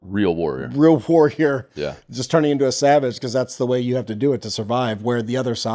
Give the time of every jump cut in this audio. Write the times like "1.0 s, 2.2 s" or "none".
none